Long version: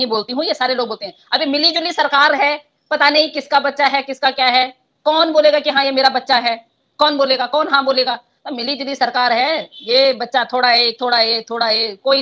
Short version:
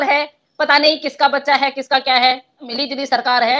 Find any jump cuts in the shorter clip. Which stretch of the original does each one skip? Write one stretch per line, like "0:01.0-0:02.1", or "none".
0:04.8-0:08.4